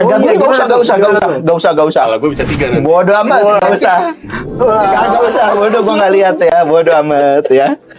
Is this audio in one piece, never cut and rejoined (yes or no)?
yes